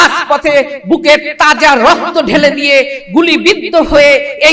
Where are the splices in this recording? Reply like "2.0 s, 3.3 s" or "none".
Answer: none